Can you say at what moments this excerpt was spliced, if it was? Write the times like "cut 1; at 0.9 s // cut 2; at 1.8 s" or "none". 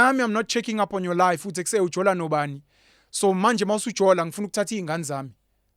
none